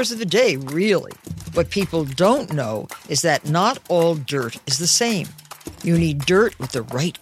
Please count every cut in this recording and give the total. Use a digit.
0